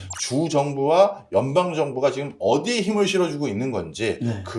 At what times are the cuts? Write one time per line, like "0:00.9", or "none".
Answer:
none